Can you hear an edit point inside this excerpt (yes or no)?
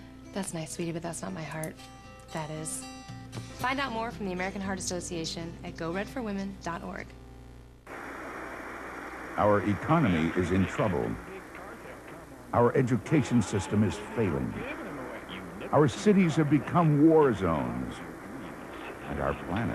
no